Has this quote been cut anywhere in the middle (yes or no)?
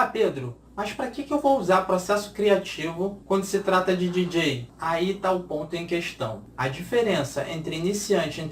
yes